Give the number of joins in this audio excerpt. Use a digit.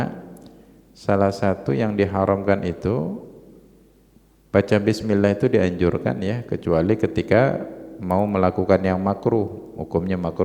0